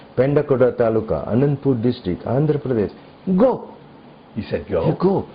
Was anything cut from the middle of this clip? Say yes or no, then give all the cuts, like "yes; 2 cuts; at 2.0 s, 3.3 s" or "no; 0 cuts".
no; 0 cuts